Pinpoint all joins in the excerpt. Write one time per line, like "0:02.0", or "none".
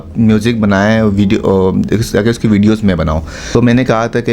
0:03.3

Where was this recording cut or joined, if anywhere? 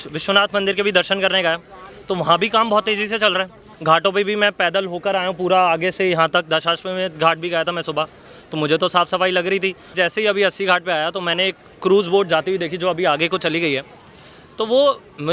0:03.7
0:09.9

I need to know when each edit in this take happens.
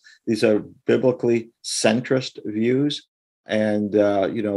0:03.5

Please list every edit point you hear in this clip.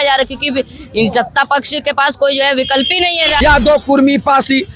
0:03.3

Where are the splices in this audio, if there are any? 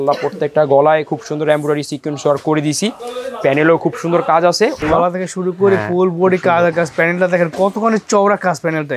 0:04.8

